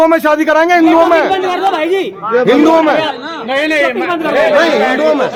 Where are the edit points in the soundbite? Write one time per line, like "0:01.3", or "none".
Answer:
none